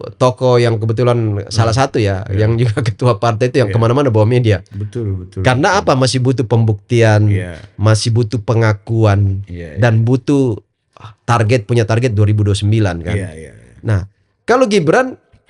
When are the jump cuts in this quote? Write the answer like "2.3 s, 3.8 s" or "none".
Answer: none

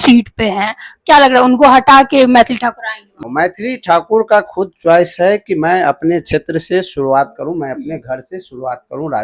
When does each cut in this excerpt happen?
3.2 s

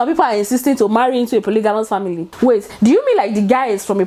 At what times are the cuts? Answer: none

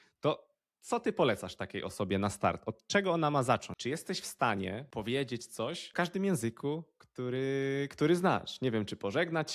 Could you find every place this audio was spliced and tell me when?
3.7 s, 4.8 s, 5.9 s

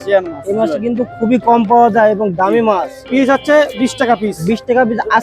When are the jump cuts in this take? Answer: 3.0 s

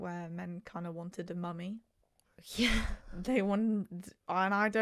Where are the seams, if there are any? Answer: none

